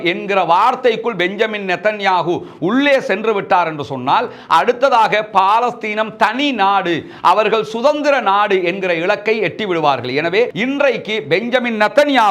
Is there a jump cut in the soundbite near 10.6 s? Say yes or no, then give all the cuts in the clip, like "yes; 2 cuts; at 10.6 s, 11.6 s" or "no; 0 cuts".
yes; 1 cut; at 10.6 s